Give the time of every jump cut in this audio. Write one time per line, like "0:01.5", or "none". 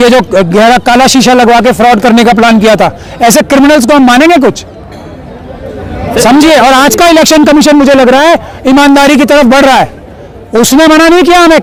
none